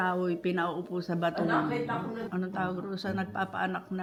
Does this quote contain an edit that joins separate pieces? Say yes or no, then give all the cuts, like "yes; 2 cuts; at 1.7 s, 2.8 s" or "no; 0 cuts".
no; 0 cuts